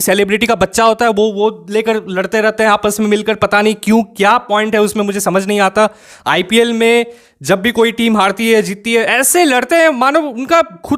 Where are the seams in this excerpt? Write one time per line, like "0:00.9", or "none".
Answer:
none